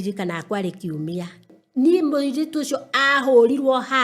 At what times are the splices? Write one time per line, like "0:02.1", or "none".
0:01.4